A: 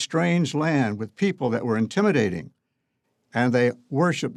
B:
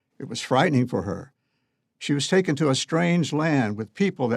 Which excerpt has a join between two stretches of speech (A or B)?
B